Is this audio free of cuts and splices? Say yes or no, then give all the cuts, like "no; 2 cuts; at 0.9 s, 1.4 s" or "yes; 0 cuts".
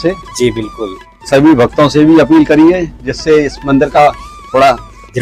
yes; 0 cuts